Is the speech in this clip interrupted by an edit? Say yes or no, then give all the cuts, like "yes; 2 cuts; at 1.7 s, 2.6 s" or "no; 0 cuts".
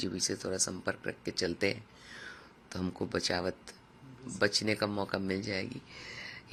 no; 0 cuts